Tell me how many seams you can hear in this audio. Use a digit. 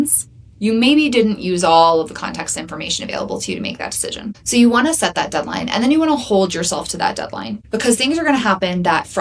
2